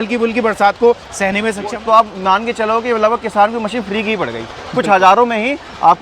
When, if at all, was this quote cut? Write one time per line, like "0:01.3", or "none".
0:01.7